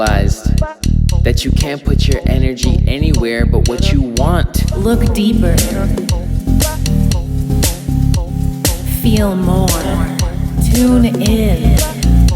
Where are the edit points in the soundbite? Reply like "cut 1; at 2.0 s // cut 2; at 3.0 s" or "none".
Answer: cut 1; at 4.7 s // cut 2; at 10.6 s